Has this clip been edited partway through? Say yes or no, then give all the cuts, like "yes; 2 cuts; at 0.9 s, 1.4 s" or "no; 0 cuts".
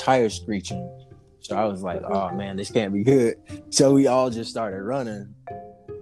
no; 0 cuts